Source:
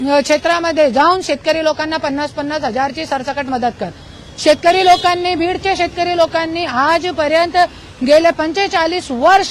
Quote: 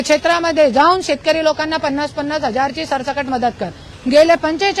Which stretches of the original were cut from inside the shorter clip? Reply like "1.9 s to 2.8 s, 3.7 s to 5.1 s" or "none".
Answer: 4.1 s to 7.9 s